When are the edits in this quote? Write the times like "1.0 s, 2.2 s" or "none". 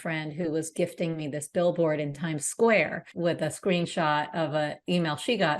3.0 s